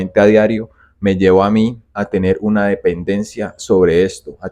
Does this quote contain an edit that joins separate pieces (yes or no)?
no